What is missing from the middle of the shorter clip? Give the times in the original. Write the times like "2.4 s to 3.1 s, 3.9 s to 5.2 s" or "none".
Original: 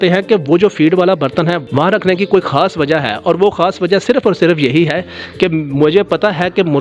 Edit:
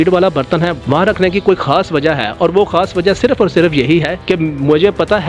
5.0 s to 5.3 s